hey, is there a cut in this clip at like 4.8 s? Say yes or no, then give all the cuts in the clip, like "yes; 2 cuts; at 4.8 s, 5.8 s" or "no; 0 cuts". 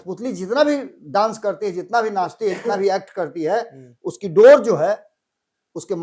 no; 0 cuts